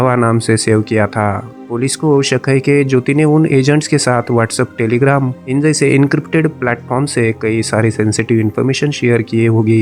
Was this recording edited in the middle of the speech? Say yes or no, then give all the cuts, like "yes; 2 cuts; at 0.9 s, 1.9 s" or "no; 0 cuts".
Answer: no; 0 cuts